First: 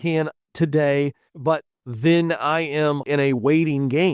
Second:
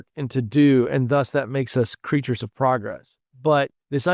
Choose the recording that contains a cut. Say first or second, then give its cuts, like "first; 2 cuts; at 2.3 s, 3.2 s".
first; 2 cuts; at 1.3 s, 3.1 s